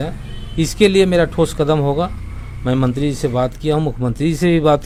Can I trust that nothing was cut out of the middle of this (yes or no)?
yes